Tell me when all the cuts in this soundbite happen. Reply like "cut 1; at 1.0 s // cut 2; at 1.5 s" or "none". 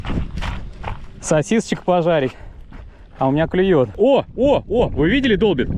cut 1; at 3.9 s